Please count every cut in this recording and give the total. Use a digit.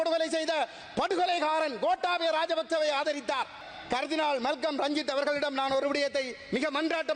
1